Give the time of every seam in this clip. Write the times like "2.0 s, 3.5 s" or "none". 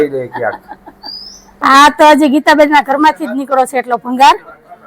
1.6 s